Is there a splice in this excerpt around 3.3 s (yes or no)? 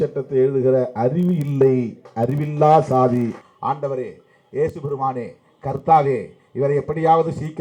yes